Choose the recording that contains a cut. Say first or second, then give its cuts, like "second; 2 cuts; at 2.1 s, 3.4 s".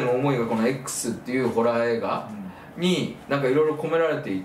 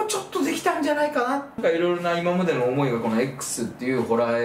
second; 1 cut; at 1.6 s